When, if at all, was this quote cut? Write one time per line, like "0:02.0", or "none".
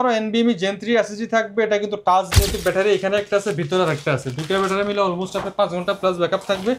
0:02.4